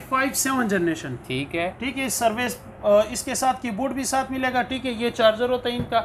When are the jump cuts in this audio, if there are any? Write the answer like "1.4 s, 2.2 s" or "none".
none